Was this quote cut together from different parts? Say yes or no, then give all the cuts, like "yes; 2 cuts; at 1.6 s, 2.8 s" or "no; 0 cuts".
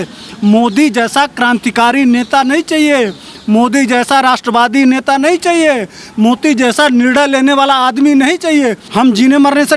yes; 1 cut; at 8.8 s